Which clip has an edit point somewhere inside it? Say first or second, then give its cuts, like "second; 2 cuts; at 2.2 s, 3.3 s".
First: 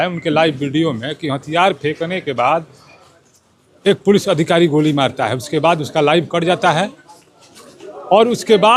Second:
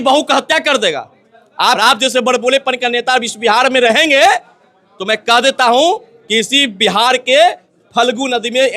second; 1 cut; at 1.8 s